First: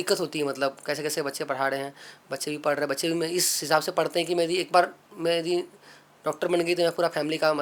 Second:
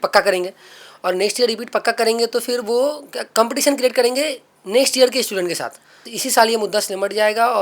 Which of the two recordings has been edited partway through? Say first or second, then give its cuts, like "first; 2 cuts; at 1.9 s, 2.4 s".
second; 1 cut; at 6.2 s